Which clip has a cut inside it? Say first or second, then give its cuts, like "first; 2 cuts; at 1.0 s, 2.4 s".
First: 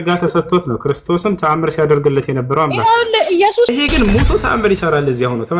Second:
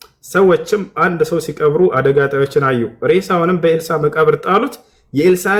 first; 1 cut; at 3.7 s